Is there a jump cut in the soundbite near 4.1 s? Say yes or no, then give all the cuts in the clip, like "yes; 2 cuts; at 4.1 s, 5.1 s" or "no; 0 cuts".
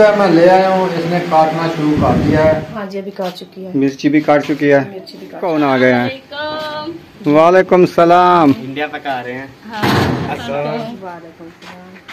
no; 3 cuts; at 2.7 s, 5.4 s, 10.4 s